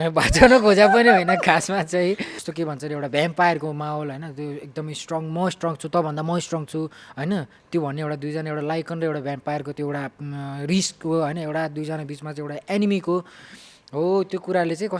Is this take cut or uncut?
cut